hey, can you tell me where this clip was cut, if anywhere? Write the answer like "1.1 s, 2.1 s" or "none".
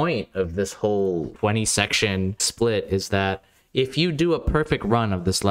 1.3 s, 2.4 s